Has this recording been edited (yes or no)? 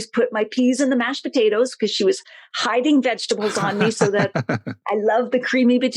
yes